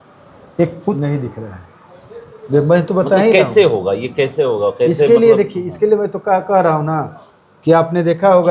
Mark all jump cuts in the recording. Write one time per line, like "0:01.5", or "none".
0:01.0